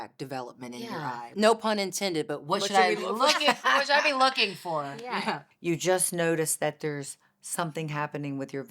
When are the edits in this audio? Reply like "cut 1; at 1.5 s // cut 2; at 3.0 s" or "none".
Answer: cut 1; at 1.3 s // cut 2; at 5.5 s